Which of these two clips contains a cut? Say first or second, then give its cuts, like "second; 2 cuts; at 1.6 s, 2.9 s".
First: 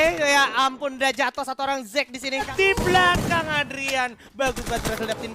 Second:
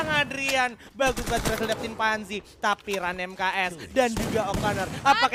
first; 1 cut; at 2.5 s